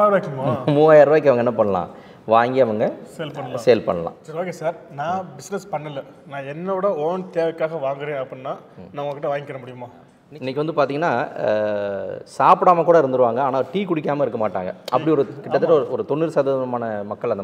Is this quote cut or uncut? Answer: cut